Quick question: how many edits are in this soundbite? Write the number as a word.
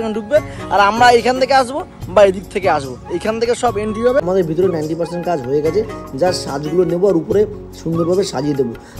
one